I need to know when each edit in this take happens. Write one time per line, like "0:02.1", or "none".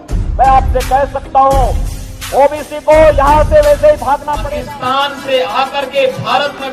0:04.3